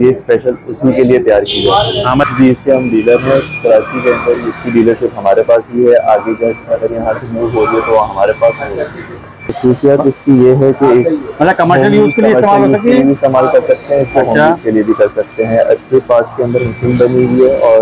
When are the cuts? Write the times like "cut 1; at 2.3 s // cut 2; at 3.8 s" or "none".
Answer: cut 1; at 2.2 s // cut 2; at 9.6 s